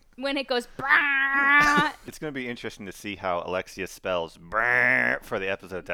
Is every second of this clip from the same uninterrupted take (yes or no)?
no